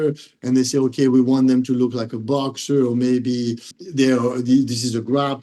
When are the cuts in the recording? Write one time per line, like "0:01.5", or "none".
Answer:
0:03.8